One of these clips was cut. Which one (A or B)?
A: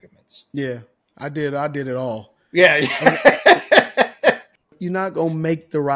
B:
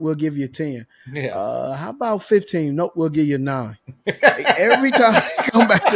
A